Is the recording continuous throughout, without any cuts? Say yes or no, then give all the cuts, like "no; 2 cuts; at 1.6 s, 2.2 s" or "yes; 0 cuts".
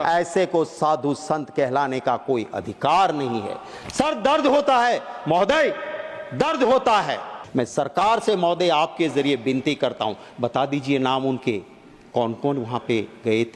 no; 1 cut; at 7.4 s